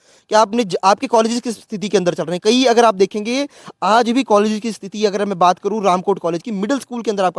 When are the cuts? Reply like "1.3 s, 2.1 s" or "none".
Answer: none